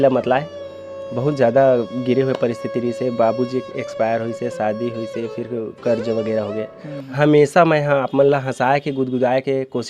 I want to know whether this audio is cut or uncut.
cut